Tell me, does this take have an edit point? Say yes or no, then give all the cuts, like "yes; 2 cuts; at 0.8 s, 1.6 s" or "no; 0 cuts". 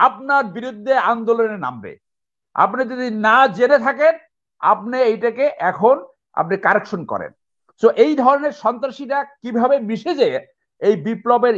no; 0 cuts